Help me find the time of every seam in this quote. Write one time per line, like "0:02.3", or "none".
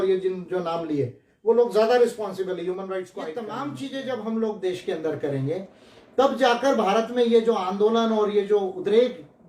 0:03.3